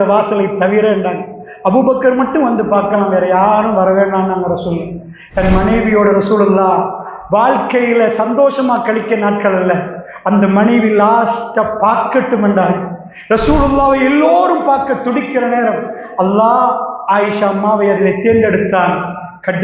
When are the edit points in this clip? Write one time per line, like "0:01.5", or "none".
none